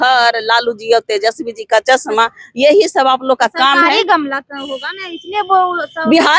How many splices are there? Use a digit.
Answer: 0